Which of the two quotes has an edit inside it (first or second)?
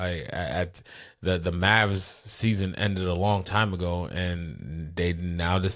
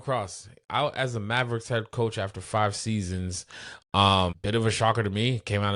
second